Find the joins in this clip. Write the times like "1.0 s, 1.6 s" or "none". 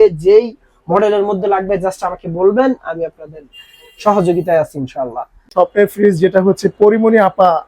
5.5 s